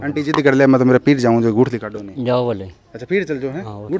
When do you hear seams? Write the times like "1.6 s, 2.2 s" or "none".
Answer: none